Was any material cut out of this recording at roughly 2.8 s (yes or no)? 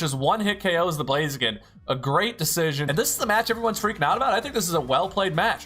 yes